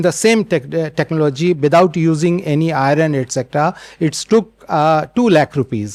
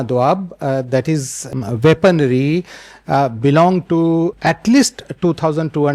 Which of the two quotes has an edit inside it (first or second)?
second